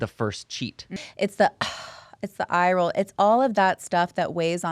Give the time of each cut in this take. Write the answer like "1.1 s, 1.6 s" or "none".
0.9 s